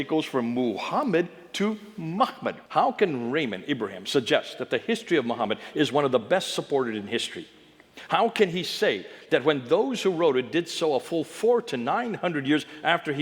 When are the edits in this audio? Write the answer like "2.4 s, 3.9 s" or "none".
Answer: 2.6 s

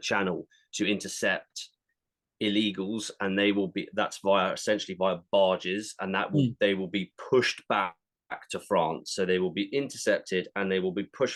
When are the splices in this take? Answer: none

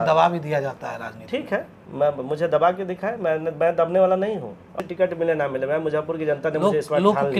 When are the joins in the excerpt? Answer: 4.7 s

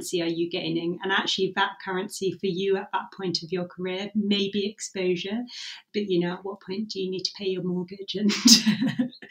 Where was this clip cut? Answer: 5.9 s

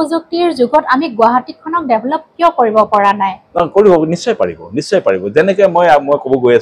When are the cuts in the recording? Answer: none

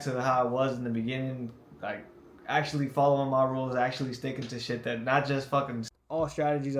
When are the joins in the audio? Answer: 5.8 s

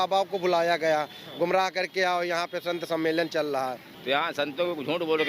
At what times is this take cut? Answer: 3.9 s

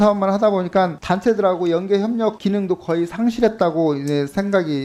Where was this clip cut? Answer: none

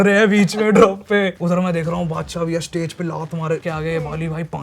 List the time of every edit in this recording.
1.4 s, 3.6 s

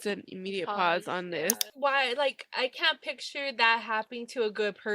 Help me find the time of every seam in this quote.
1.7 s

